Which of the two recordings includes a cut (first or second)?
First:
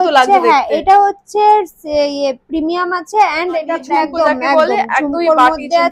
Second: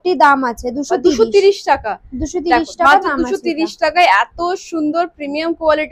first